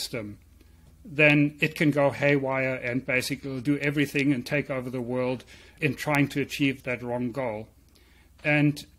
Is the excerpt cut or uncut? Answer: cut